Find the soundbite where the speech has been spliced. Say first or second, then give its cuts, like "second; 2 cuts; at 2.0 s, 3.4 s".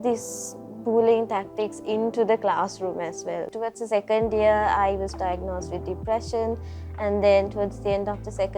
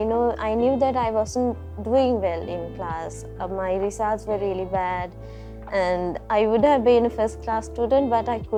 first; 1 cut; at 3.5 s